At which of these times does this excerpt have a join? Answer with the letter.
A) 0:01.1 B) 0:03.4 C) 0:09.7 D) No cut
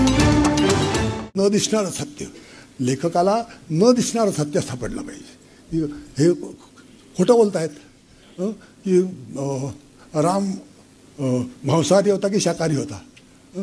A